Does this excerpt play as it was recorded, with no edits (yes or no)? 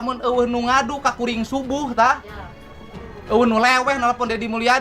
yes